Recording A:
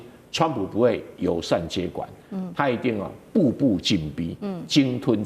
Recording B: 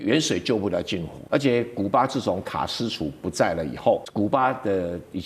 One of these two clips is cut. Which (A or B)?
B